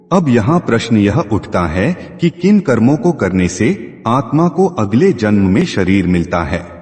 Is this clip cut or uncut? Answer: cut